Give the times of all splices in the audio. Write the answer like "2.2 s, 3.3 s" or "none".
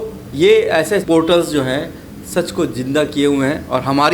1.0 s